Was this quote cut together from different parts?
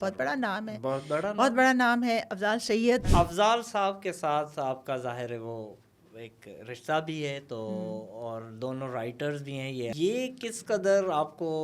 yes; 2 cuts; at 3.1 s, 9.9 s

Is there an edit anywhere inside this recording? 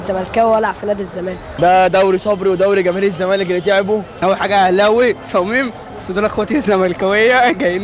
yes; 2 cuts; at 1.4 s, 4.1 s

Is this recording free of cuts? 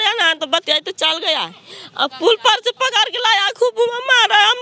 yes; 0 cuts

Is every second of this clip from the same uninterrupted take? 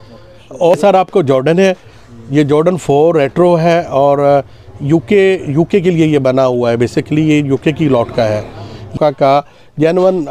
no; 2 cuts; at 0.7 s, 8.9 s

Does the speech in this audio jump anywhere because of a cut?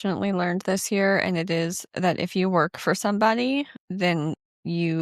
yes; 1 cut; at 3.8 s

